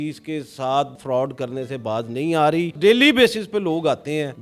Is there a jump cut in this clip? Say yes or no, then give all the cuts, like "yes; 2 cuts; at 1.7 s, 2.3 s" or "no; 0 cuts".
yes; 1 cut; at 2.8 s